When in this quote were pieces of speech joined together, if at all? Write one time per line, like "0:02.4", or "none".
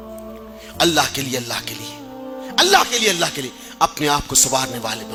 none